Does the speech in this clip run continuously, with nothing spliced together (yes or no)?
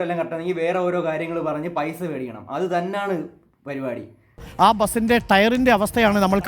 no